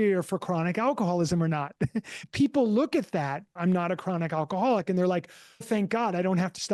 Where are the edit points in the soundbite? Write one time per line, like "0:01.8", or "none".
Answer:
0:02.2
0:03.6
0:05.6